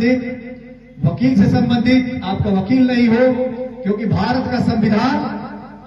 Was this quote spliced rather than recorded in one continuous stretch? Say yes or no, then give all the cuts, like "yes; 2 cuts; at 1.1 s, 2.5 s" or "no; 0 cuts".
no; 0 cuts